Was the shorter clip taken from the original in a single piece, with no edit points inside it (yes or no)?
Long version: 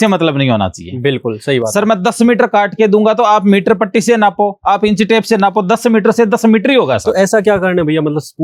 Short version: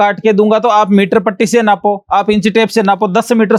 yes